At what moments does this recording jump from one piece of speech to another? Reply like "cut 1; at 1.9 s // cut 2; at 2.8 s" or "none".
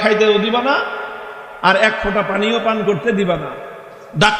none